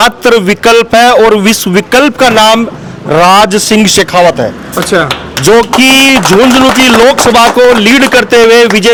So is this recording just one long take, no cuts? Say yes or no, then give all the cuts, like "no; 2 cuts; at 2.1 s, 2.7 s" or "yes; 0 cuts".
yes; 0 cuts